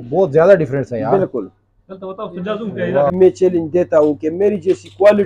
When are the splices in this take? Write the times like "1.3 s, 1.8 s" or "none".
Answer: 3.1 s